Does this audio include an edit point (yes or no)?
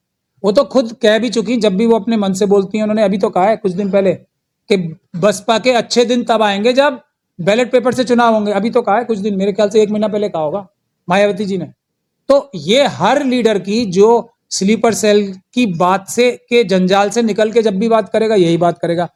no